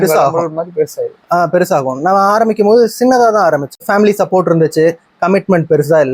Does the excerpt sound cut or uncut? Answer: uncut